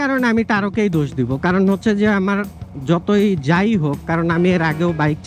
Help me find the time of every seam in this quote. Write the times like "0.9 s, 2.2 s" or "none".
none